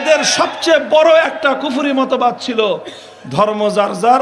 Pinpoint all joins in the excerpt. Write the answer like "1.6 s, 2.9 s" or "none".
none

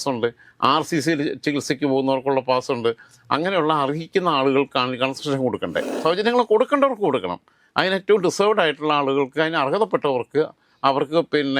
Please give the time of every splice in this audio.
6.0 s

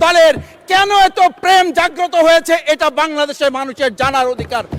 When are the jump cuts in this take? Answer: none

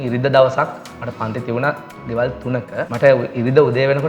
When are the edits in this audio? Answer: 2.8 s

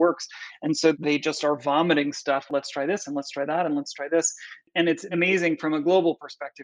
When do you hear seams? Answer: 0.9 s, 2.5 s, 4.9 s

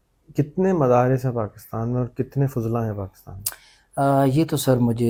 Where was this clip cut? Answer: none

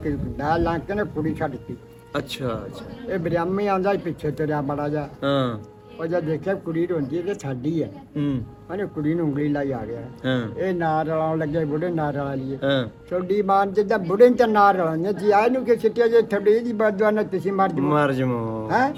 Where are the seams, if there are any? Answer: none

